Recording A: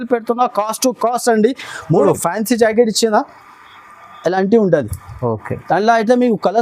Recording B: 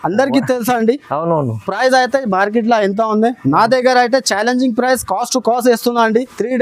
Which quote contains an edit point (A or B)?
A